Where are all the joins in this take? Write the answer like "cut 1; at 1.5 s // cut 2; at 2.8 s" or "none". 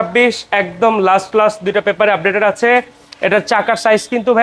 none